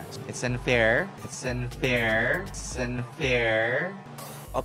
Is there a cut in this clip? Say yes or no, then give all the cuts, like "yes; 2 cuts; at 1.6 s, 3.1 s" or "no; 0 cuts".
no; 0 cuts